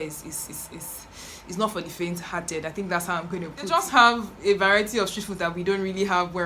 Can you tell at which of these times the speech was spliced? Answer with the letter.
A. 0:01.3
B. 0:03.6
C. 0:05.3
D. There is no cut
B